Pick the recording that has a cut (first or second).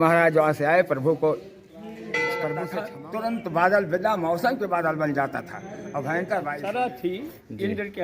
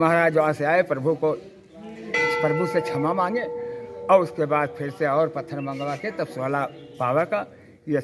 first